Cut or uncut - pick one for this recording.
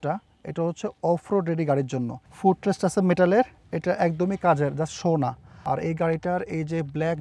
cut